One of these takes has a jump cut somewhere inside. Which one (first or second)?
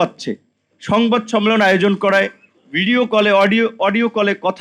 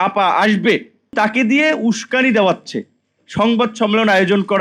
second